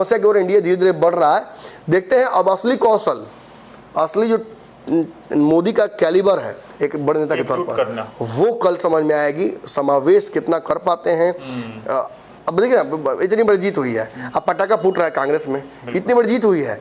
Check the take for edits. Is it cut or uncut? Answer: uncut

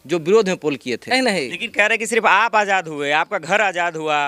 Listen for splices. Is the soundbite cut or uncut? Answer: cut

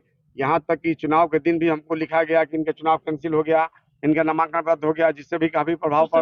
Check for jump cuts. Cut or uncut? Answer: uncut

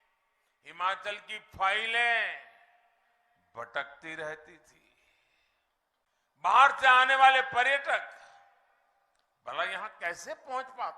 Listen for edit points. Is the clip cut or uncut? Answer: cut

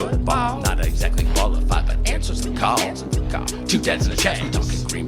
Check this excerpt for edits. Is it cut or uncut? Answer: uncut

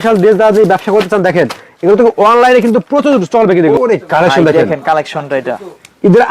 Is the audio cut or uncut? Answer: cut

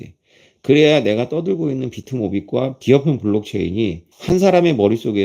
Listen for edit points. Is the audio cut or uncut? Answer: cut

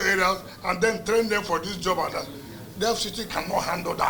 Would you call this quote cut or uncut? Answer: uncut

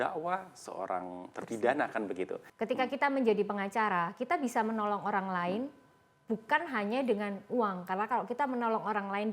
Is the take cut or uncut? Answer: cut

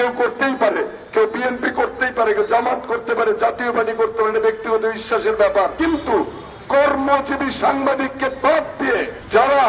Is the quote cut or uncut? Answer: cut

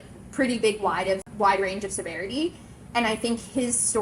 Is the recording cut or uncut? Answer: uncut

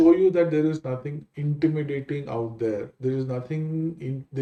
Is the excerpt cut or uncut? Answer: uncut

